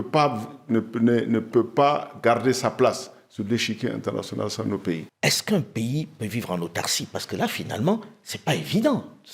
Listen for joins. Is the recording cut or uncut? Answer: cut